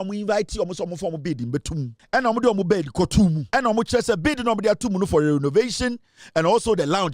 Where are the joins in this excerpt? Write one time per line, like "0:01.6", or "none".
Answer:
0:02.0
0:03.4